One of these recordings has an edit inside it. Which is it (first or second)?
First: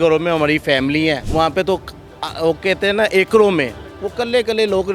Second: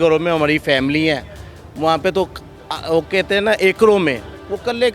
first